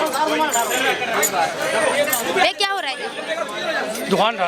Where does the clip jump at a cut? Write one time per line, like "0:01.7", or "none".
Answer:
none